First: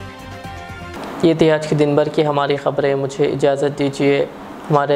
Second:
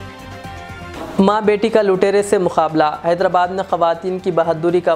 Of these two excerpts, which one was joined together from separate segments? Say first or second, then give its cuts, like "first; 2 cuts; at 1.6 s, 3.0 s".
second; 1 cut; at 0.9 s